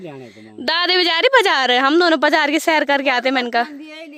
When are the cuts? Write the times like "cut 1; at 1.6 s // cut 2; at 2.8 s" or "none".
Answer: none